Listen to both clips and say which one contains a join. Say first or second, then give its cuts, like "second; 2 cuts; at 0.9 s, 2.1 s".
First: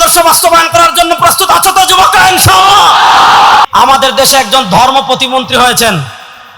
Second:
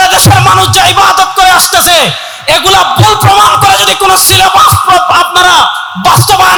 first; 1 cut; at 3.6 s